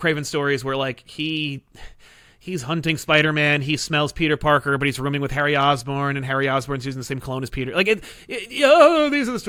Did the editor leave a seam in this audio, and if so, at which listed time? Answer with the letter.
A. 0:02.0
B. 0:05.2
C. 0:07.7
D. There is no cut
D